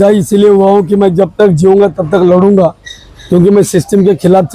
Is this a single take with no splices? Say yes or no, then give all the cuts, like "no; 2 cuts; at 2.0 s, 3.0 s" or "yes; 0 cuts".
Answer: yes; 0 cuts